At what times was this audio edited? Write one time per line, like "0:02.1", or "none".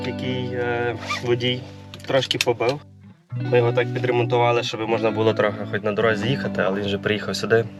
none

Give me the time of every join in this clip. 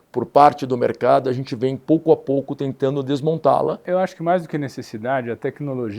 0:03.8

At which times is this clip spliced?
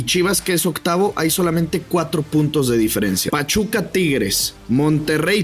0:03.2
0:04.5

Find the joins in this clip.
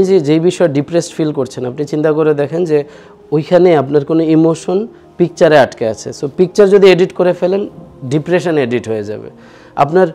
none

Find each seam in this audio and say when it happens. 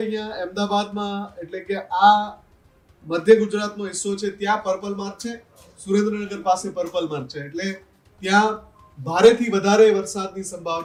none

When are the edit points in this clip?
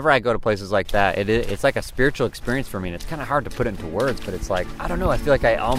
0:04.8

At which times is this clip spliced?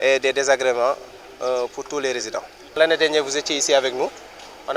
0:02.8

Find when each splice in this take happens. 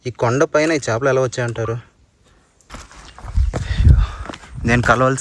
0:02.6

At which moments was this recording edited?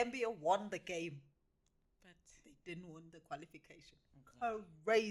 none

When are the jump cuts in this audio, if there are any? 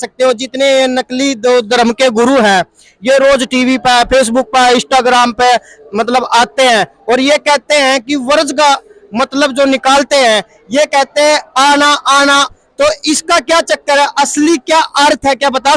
0:12.5

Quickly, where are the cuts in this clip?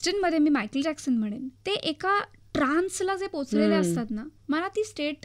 0:01.5
0:04.3

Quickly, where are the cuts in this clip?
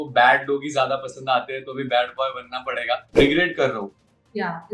0:03.1

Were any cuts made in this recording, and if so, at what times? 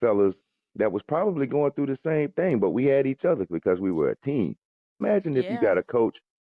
0:05.0

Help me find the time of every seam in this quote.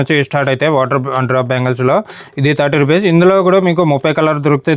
none

